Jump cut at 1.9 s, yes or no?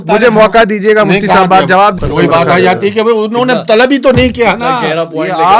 yes